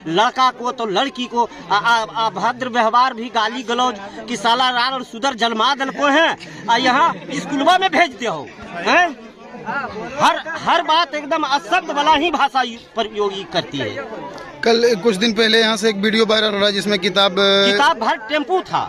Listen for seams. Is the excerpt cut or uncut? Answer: uncut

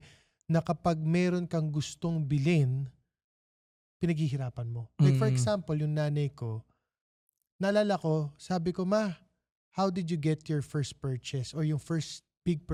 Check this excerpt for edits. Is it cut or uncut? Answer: uncut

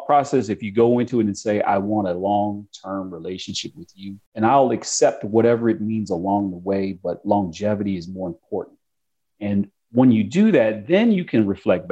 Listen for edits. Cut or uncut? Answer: cut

